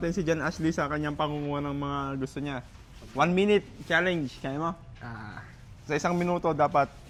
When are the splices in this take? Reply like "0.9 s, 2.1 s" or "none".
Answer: none